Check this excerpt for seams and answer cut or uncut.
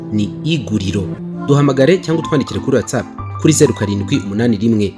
cut